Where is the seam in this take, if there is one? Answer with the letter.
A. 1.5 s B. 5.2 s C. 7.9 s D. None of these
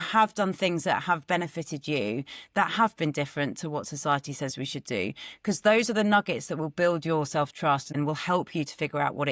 C